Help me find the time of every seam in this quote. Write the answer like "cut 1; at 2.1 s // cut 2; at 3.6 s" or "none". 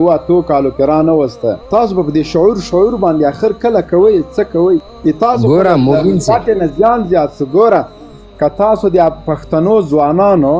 cut 1; at 1.6 s // cut 2; at 4.9 s